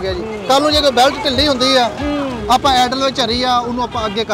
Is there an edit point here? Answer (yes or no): no